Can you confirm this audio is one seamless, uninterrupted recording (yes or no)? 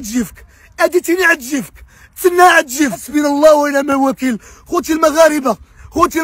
no